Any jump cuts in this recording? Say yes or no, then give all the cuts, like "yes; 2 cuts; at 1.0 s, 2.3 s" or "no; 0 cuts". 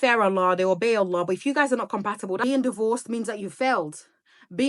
yes; 1 cut; at 2.4 s